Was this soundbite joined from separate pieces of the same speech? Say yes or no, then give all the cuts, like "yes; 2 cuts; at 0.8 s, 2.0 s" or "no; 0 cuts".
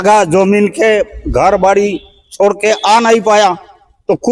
no; 0 cuts